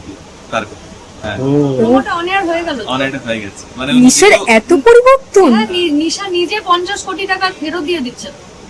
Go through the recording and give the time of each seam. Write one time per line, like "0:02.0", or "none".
none

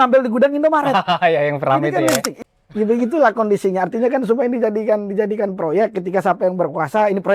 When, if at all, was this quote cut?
0:02.4

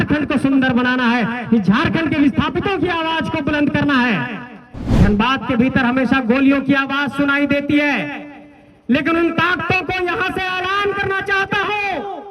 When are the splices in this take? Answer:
0:05.0

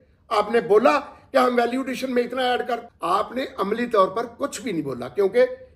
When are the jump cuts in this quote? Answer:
0:02.9

